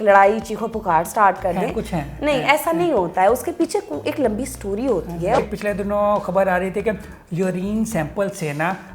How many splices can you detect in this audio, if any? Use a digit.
1